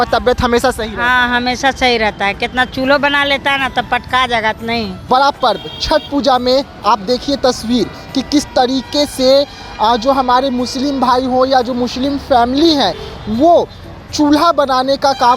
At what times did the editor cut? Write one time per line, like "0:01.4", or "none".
0:05.0